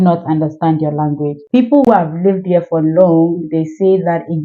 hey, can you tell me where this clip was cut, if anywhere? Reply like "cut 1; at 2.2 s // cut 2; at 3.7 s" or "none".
cut 1; at 1.9 s